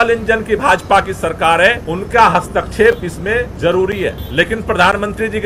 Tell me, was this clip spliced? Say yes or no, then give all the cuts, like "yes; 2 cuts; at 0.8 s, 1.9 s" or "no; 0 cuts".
yes; 3 cuts; at 1.9 s, 3.5 s, 4.2 s